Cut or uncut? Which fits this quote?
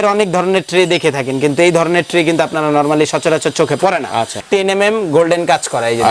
cut